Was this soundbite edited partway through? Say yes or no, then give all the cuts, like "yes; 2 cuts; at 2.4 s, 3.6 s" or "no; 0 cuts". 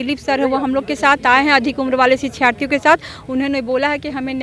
no; 0 cuts